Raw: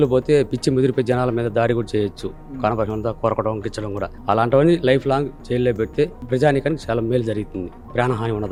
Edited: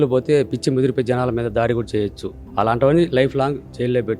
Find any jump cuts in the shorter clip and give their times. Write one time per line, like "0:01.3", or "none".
0:02.4